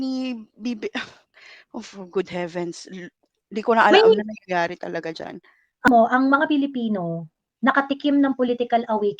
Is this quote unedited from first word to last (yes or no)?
no